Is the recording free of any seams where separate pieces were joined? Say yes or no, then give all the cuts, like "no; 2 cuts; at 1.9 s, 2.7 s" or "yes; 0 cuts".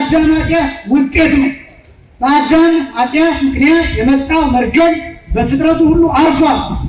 yes; 0 cuts